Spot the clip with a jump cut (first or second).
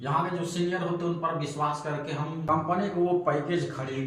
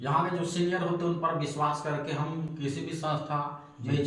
first